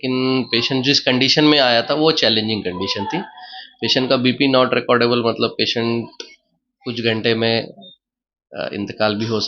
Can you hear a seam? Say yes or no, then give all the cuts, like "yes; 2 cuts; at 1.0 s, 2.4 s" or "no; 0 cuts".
no; 0 cuts